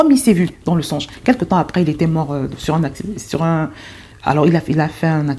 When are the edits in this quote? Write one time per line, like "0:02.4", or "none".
none